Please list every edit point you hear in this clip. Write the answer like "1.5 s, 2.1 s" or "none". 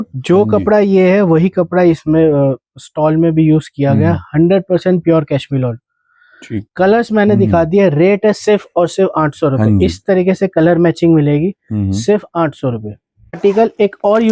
none